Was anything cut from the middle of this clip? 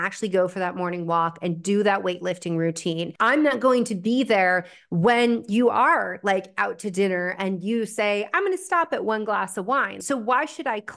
yes; 2 cuts; at 3.1 s, 9.9 s

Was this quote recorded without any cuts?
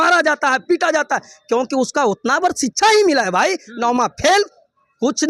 yes; 0 cuts

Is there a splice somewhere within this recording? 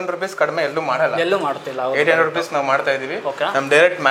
no; 0 cuts

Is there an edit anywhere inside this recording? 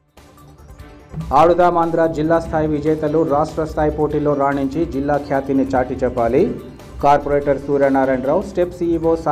no; 0 cuts

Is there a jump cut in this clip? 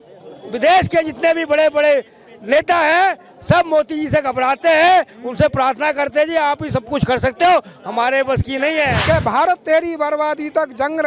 yes; 1 cut; at 9.0 s

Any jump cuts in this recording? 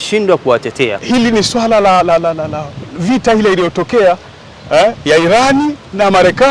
yes; 1 cut; at 1.0 s

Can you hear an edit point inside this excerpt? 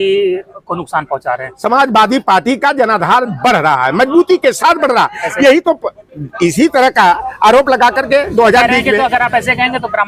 no; 0 cuts

